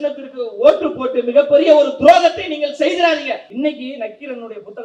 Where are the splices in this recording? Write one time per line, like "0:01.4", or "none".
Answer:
0:03.5